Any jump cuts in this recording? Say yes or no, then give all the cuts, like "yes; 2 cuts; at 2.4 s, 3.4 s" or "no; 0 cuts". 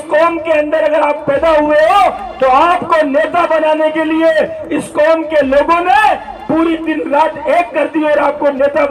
no; 0 cuts